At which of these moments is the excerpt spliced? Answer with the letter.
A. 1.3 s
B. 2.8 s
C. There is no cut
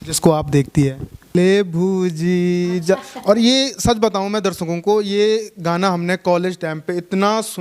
A